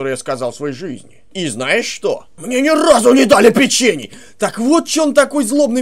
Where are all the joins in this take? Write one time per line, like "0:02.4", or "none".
0:01.3
0:02.3